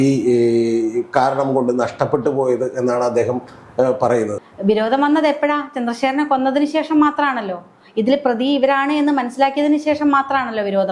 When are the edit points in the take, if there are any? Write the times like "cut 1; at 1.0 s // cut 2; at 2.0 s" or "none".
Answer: cut 1; at 4.3 s